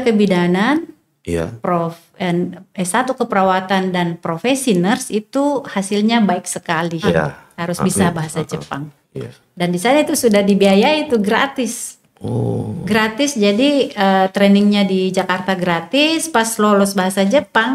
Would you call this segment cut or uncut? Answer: cut